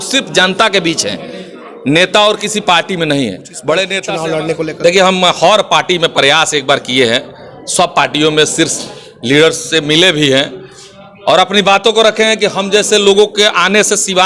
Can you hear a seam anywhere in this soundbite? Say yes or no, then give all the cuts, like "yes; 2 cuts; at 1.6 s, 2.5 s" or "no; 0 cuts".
yes; 1 cut; at 4.0 s